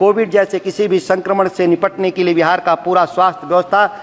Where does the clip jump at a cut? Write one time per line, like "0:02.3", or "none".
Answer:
none